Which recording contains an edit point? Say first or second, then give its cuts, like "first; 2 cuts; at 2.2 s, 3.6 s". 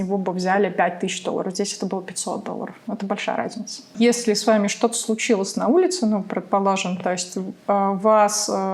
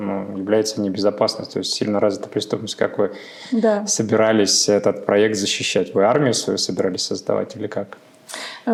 first; 1 cut; at 3.9 s